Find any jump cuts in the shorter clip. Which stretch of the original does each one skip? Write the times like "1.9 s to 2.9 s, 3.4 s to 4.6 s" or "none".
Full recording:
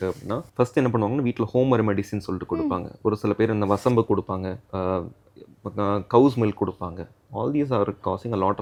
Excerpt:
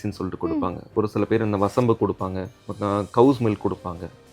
4.6 s to 5.5 s

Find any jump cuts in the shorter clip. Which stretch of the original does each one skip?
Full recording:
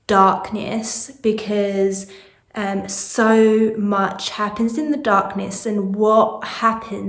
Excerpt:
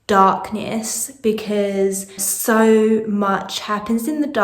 2.3 s to 3.0 s

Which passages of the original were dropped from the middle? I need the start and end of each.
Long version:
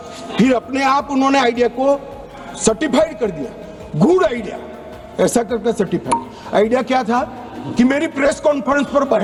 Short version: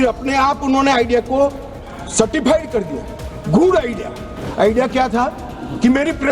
4.9 s to 6.4 s

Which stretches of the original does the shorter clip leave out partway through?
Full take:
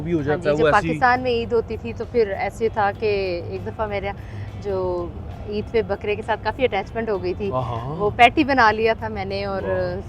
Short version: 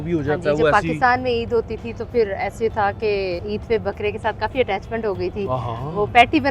3.4 s to 5.5 s

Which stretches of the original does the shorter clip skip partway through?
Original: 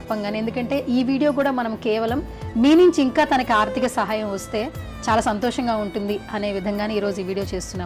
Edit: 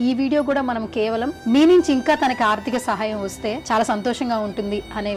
2.2 s to 2.4 s, 4.7 s to 5.0 s

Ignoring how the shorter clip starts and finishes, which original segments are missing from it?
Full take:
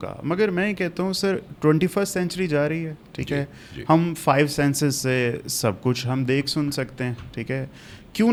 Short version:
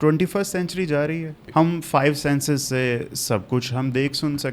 2.9 s to 3.7 s

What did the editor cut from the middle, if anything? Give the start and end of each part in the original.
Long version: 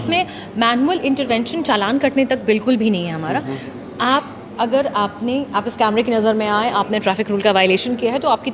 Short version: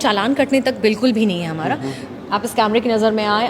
3.9 s to 5.5 s

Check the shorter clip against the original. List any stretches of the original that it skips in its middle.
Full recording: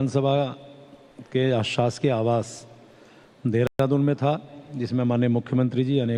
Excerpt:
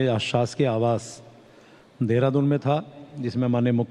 3.7 s to 3.8 s

